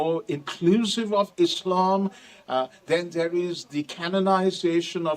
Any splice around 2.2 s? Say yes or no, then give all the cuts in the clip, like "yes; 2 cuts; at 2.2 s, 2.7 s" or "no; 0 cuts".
no; 0 cuts